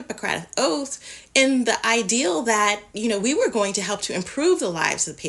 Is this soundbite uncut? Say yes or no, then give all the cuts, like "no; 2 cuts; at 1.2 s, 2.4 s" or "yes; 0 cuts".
yes; 0 cuts